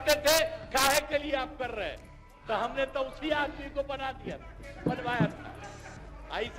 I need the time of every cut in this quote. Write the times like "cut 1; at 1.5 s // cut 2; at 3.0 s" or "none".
none